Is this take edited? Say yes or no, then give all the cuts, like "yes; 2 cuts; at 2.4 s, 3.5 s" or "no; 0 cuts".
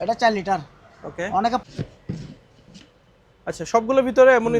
yes; 1 cut; at 1.6 s